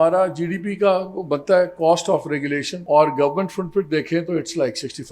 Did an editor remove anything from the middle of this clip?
yes; 1 cut; at 2.7 s

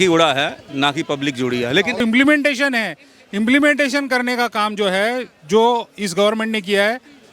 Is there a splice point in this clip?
yes; 1 cut; at 2.0 s

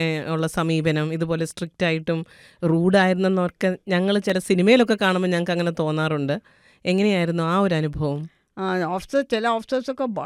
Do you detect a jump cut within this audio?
no; 0 cuts

